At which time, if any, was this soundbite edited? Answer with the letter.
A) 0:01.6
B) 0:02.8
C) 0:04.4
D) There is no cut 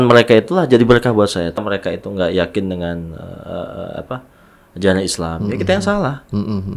A